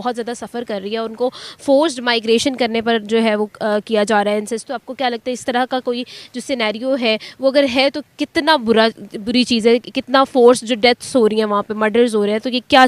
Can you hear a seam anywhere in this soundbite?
no; 0 cuts

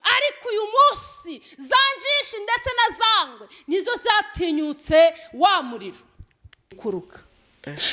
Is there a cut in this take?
yes; 1 cut; at 6.8 s

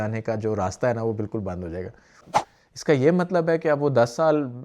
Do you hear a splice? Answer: yes; 1 cut; at 2.2 s

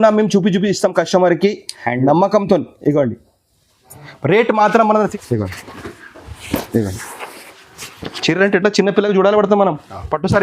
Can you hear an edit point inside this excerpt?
yes; 1 cut; at 5.1 s

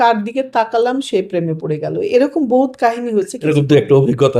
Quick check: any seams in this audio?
yes; 1 cut; at 3.4 s

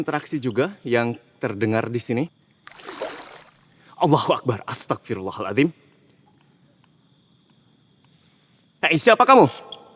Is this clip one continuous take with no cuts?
no; 1 cut; at 8.8 s

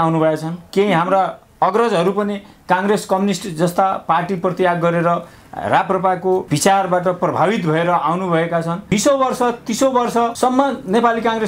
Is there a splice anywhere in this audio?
yes; 3 cuts; at 6.5 s, 8.8 s, 10.3 s

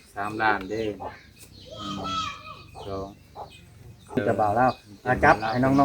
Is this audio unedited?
no; 1 cut; at 4.2 s

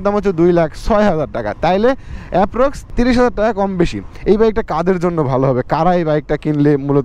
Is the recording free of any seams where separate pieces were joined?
no; 2 cuts; at 2.9 s, 4.1 s

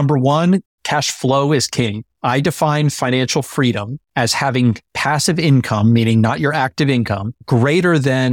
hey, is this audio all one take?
no; 1 cut; at 4.9 s

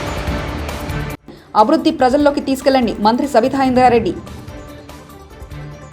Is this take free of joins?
yes; 0 cuts

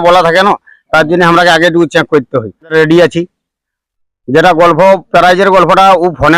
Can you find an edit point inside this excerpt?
yes; 1 cut; at 2.7 s

